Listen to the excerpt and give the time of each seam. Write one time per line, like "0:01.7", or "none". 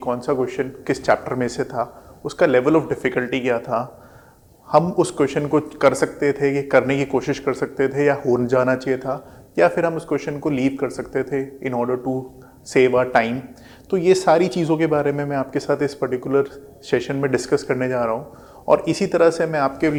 none